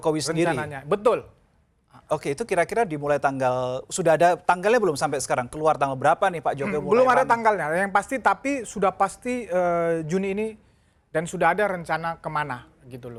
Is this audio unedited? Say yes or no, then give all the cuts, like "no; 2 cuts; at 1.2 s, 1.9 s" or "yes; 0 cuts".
yes; 0 cuts